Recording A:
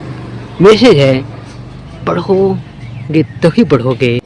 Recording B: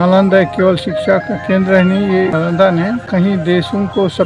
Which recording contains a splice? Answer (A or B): B